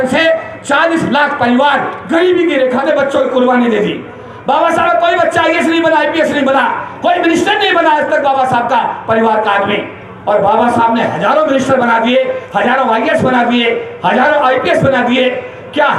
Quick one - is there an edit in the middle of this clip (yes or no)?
yes